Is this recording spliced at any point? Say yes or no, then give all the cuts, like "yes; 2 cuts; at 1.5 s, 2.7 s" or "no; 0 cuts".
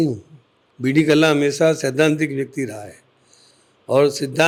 no; 0 cuts